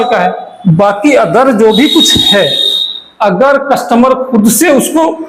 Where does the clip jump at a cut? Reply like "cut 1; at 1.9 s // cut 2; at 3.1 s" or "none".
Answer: none